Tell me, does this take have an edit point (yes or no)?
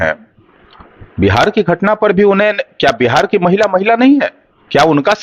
no